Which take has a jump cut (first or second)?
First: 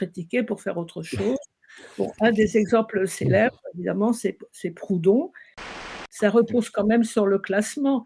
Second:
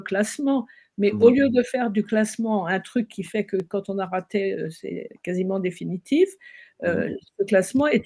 first